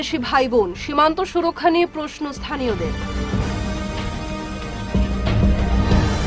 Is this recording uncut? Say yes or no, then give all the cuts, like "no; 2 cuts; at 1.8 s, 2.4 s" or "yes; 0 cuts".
yes; 0 cuts